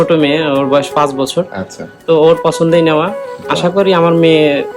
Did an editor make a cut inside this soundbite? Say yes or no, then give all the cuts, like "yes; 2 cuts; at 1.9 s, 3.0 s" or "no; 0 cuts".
no; 0 cuts